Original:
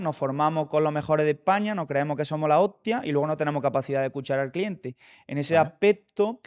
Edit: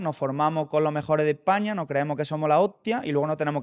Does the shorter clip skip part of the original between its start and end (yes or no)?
no